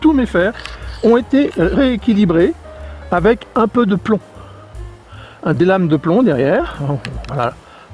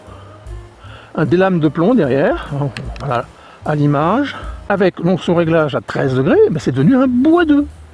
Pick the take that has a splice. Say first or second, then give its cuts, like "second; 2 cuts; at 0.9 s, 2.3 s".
second; 1 cut; at 4.6 s